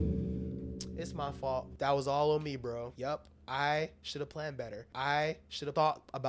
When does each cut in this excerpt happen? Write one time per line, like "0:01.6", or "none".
0:01.7
0:02.9
0:05.2